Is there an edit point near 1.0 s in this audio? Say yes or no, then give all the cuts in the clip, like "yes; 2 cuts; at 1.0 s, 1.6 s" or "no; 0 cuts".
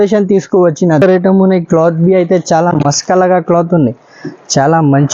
yes; 1 cut; at 1.0 s